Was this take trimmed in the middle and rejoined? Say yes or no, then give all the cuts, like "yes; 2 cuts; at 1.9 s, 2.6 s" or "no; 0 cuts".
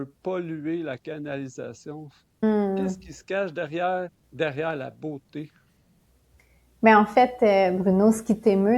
yes; 1 cut; at 2.4 s